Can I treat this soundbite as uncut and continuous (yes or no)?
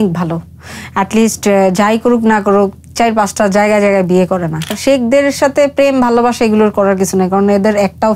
no